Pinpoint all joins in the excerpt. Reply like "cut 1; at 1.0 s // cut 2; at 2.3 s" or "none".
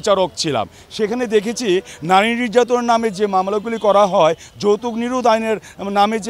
none